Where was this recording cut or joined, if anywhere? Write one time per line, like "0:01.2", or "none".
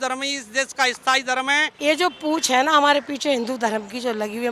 0:01.7